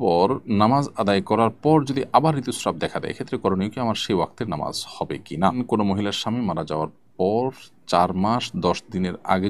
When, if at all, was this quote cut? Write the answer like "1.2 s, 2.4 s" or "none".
5.6 s